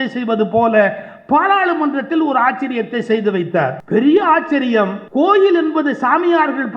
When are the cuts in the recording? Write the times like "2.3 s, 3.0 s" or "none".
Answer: 3.8 s, 5.0 s